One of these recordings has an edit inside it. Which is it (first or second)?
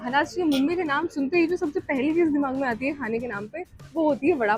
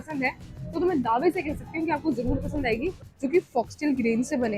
second